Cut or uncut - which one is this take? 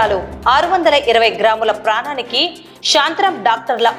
uncut